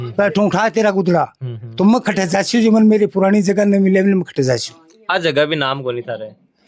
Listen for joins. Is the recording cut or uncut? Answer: uncut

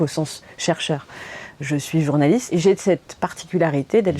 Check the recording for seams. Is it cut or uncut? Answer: cut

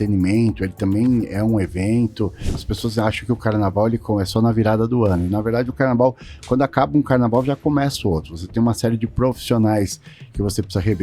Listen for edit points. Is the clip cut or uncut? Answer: cut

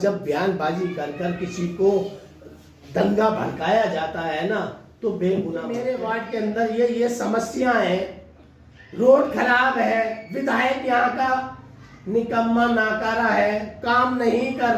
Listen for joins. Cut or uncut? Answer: cut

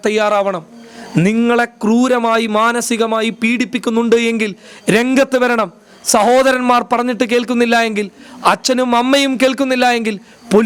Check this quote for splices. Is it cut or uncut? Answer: uncut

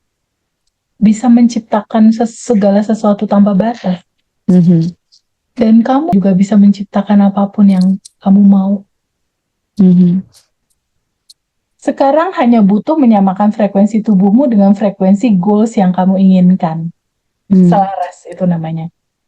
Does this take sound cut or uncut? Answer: cut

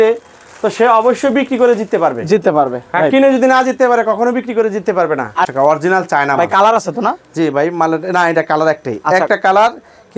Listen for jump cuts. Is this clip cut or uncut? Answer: cut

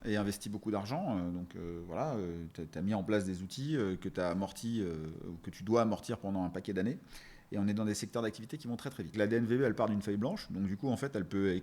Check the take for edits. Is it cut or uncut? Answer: cut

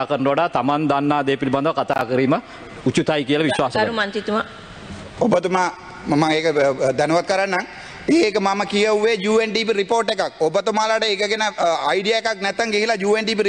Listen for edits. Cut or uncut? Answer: uncut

